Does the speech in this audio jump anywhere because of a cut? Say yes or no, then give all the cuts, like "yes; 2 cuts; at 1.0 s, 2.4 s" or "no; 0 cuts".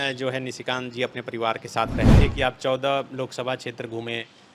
yes; 1 cut; at 2.2 s